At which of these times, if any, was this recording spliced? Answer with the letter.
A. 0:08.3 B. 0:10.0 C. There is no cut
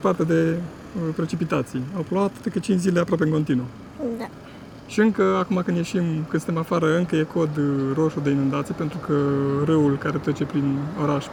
C